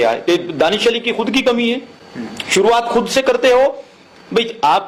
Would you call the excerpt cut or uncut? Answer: uncut